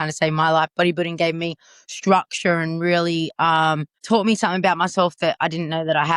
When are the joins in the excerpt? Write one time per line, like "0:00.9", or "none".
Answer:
0:03.9